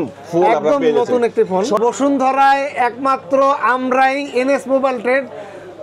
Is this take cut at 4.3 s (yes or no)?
no